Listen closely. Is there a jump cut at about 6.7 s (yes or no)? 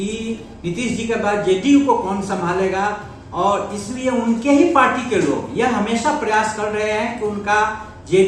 no